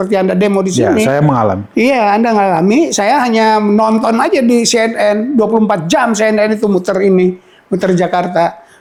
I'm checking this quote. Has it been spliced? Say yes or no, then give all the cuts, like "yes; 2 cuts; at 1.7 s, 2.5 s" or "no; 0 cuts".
no; 0 cuts